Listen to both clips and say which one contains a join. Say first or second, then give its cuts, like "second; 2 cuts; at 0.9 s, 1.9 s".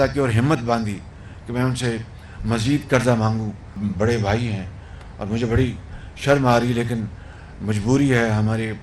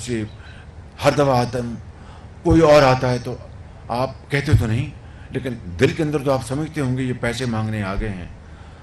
first; 1 cut; at 3.8 s